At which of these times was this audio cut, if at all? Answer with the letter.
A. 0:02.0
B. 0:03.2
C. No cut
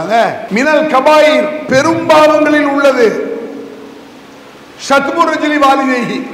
C